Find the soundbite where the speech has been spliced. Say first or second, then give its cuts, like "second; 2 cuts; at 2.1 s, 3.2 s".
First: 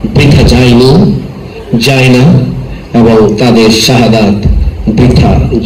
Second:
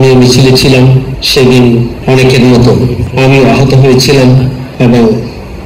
second; 4 cuts; at 1.1 s, 1.9 s, 3.0 s, 4.6 s